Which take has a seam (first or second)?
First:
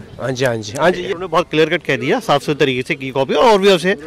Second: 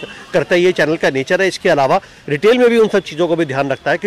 first